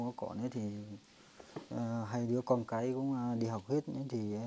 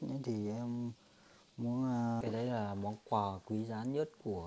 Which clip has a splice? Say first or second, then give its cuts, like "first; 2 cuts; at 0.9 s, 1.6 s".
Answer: second; 1 cut; at 2.2 s